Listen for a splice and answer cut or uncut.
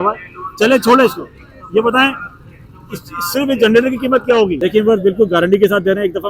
cut